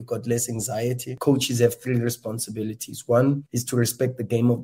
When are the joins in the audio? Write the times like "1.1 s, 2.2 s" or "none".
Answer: 1.1 s